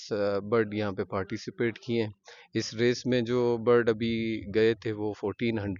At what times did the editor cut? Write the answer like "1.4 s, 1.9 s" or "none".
none

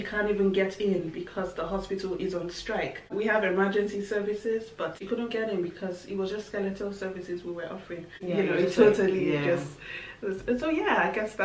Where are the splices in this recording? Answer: 3.1 s, 5.0 s, 8.2 s

